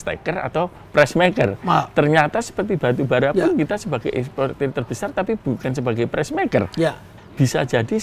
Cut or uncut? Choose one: uncut